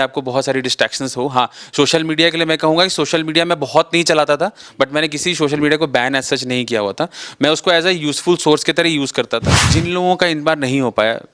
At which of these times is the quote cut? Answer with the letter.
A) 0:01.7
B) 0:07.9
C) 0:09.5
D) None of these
C